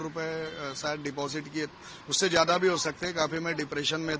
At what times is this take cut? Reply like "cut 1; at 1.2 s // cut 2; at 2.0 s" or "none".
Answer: none